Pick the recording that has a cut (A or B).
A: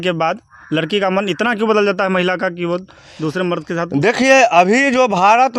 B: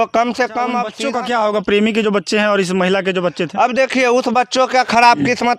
B